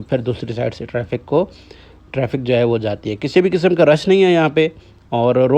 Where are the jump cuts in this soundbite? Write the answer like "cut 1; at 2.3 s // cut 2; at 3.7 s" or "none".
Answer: none